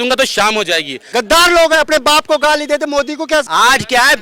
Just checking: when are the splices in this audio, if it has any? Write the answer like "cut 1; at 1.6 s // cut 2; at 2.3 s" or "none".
cut 1; at 1.1 s // cut 2; at 3.5 s